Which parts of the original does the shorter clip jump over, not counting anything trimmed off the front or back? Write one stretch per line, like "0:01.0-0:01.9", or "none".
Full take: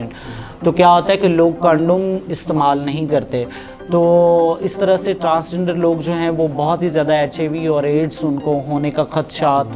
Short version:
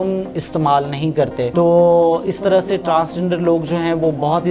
0:03.4-0:03.9